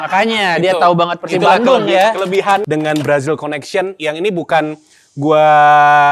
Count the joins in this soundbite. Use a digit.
1